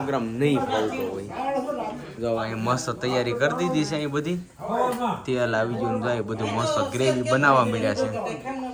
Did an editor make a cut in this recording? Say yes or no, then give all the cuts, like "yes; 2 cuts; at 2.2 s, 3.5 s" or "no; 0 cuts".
no; 0 cuts